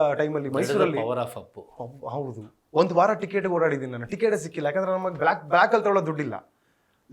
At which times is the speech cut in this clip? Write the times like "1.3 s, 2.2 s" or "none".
none